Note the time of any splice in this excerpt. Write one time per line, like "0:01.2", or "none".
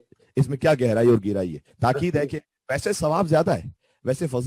0:01.7